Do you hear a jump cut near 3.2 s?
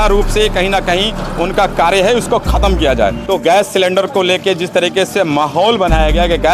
yes; 1 cut; at 3.2 s

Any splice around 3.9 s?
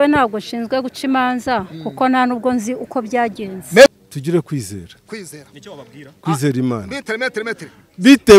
yes; 1 cut; at 3.9 s

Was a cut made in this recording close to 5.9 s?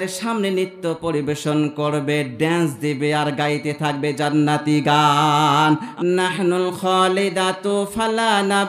yes; 1 cut; at 5.9 s

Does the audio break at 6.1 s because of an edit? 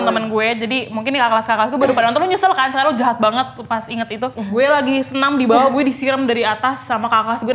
no; 1 cut; at 4.5 s

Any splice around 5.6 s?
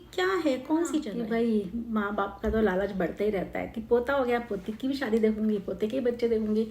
no; 1 cut; at 1.1 s

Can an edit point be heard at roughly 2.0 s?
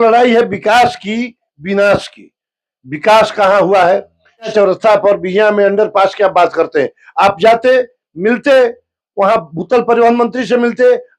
no; 1 cut; at 4.5 s

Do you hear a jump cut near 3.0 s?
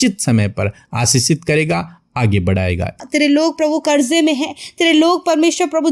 yes; 1 cut; at 3.0 s

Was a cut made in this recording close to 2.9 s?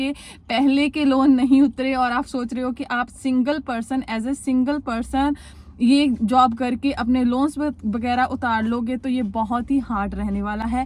no; 0 cuts

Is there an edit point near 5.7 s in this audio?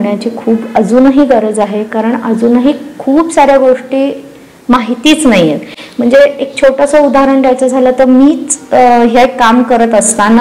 no; 0 cuts

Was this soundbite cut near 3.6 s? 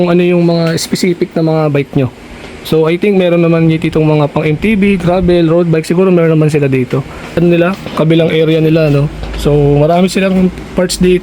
no; 1 cut; at 7.4 s

